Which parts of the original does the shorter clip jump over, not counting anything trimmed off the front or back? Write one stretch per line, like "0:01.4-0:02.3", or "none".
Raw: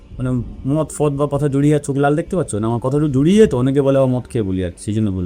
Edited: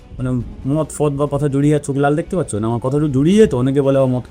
none